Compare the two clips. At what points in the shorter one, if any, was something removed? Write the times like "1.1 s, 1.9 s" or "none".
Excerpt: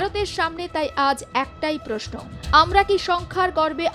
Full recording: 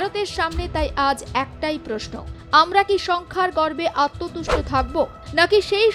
none

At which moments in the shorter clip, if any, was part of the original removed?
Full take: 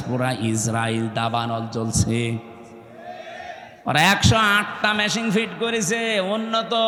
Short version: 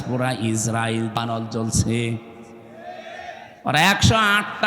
1.2 s

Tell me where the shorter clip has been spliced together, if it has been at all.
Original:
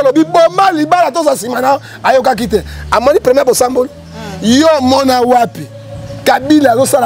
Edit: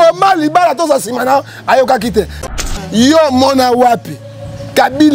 2.5 s

